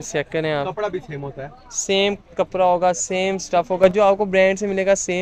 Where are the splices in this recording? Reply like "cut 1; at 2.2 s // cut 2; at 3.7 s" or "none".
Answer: none